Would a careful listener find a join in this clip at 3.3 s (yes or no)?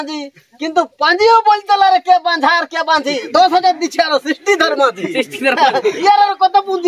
yes